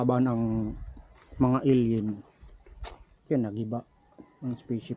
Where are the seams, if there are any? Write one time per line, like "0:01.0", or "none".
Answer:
none